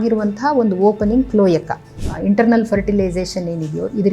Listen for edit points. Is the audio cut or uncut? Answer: cut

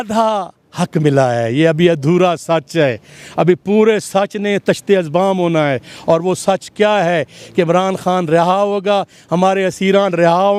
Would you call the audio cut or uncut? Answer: uncut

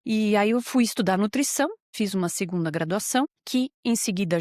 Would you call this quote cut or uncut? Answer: cut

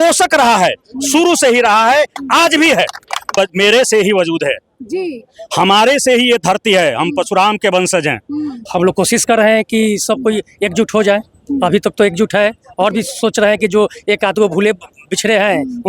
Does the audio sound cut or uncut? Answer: cut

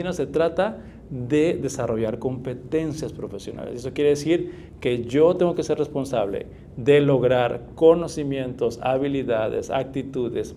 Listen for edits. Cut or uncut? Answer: uncut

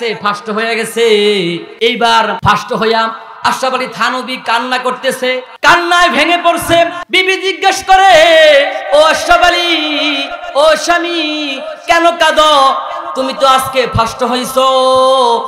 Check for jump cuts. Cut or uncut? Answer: cut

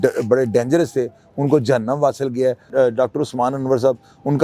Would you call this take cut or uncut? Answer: cut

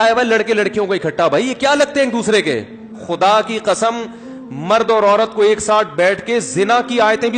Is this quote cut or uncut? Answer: cut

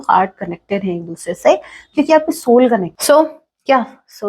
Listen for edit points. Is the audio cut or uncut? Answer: cut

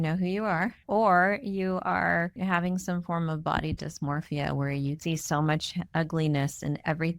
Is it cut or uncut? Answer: cut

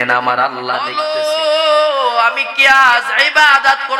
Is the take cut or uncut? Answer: cut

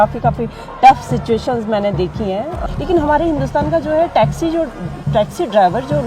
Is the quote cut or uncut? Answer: cut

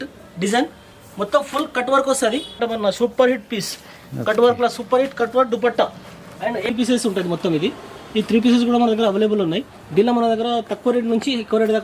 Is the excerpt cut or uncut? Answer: cut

